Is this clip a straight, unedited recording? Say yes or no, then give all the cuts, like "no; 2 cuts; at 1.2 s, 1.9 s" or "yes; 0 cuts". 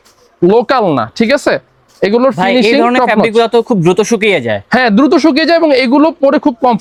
yes; 0 cuts